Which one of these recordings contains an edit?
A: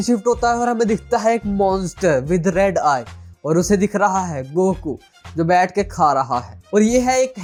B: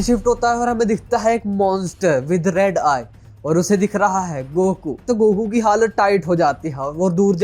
B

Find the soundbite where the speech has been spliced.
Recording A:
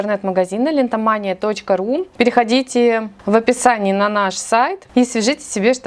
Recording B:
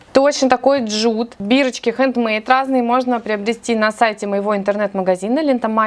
A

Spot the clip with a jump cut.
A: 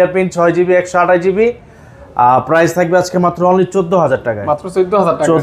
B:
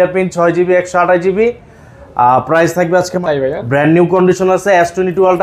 B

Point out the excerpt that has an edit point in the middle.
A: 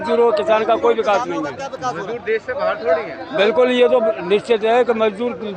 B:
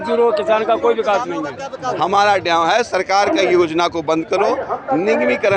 B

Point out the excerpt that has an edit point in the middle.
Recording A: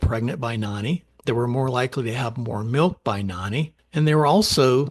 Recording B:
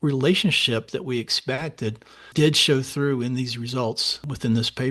A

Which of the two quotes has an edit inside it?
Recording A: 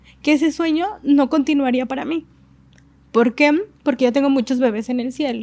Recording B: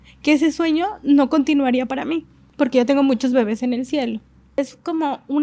B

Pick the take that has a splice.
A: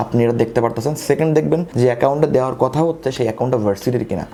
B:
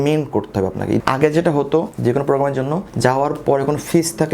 B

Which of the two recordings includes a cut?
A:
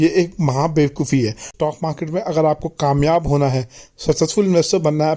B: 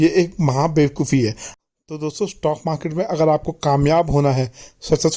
A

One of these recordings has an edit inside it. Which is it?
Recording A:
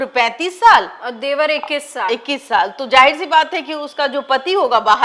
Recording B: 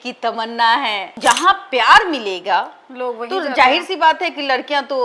B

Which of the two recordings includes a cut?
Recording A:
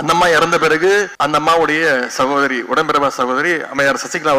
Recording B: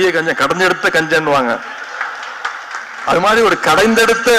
A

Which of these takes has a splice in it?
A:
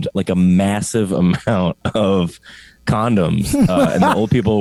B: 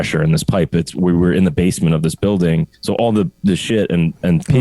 B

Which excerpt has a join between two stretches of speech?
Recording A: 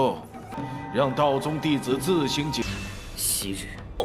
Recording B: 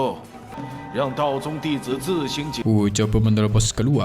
A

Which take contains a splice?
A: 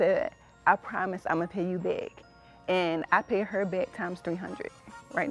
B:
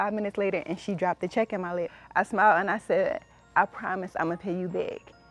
B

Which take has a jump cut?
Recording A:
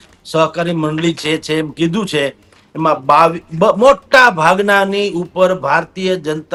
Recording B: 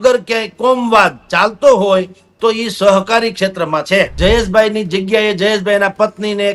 B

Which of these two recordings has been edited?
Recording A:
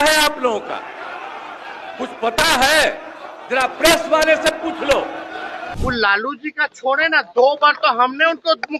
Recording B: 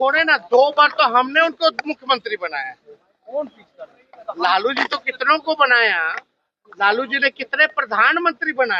A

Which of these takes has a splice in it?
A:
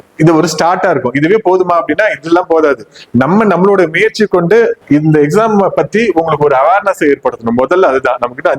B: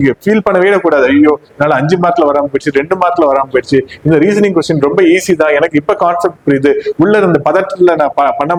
A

